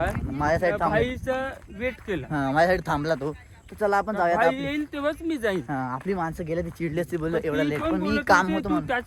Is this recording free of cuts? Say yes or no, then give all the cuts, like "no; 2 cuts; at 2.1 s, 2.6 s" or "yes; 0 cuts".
yes; 0 cuts